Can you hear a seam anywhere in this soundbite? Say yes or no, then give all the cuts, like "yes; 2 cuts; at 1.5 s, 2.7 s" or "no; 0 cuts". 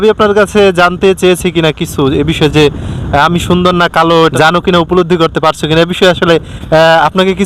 yes; 1 cut; at 4.3 s